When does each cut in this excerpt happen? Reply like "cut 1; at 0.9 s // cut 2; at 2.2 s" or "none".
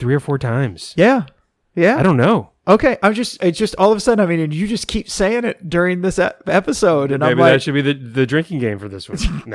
none